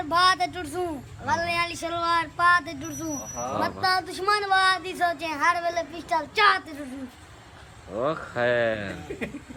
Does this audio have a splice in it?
no; 0 cuts

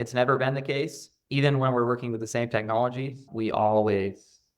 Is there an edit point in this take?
yes; 1 cut; at 3.2 s

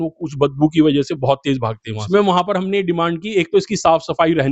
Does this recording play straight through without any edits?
no; 1 cut; at 2.1 s

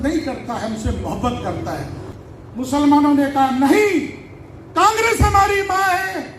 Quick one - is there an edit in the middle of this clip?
yes; 1 cut; at 2.0 s

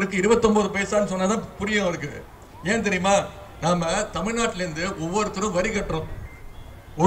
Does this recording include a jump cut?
no; 0 cuts

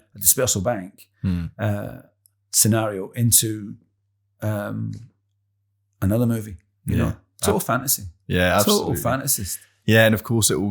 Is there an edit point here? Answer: no; 0 cuts

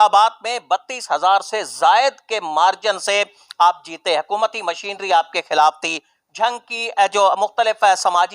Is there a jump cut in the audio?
no; 0 cuts

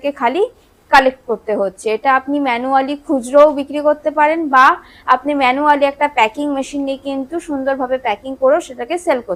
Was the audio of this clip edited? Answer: no; 0 cuts

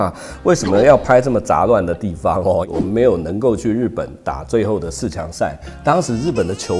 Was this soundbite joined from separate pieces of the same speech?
yes; 1 cut; at 2.6 s

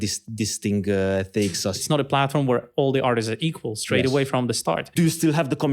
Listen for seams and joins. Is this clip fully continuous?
no; 2 cuts; at 1.8 s, 4.9 s

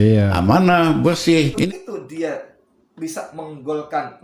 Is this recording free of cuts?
no; 1 cut; at 1.5 s

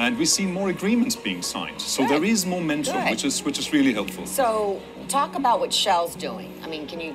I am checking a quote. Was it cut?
no; 0 cuts

